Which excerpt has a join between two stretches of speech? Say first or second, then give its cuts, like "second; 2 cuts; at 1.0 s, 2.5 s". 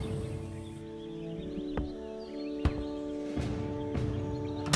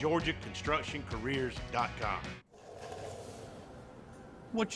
second; 1 cut; at 2.5 s